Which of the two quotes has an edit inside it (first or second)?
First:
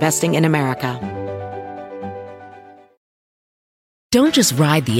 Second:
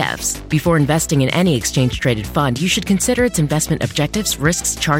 first